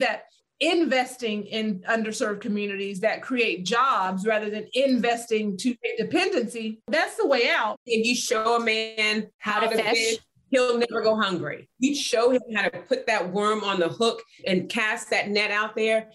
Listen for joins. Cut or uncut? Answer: cut